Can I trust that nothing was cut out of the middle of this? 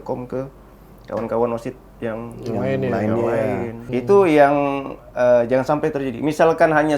no; 1 cut; at 3.8 s

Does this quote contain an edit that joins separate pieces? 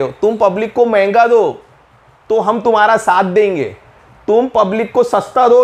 no; 0 cuts

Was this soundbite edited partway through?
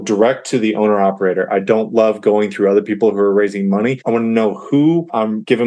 no; 0 cuts

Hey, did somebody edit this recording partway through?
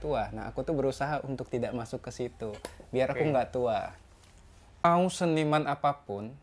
yes; 1 cut; at 4.8 s

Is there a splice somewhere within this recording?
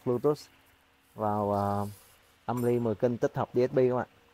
no; 0 cuts

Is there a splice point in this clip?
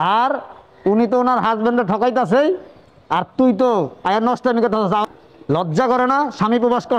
yes; 1 cut; at 5.0 s

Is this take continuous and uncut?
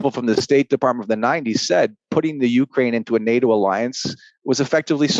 yes; 0 cuts

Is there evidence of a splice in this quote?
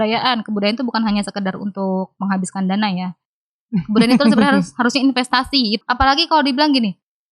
yes; 1 cut; at 5.8 s

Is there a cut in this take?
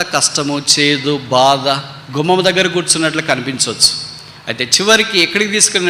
no; 0 cuts

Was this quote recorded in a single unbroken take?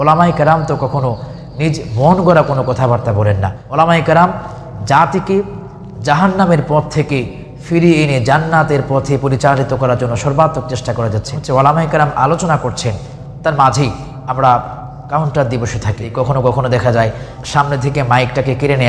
no; 4 cuts; at 3.6 s, 11.4 s, 16.1 s, 17.3 s

